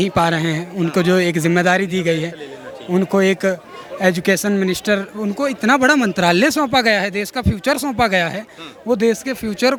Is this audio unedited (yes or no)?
yes